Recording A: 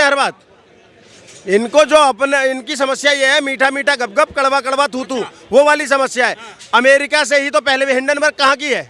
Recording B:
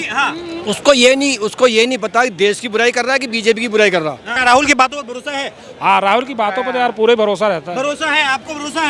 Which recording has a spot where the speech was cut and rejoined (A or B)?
B